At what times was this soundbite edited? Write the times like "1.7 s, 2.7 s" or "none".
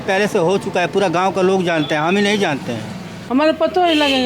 3.1 s